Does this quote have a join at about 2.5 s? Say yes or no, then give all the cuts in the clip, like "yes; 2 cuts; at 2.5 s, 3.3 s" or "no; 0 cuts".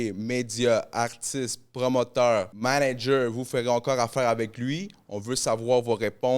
yes; 1 cut; at 2.5 s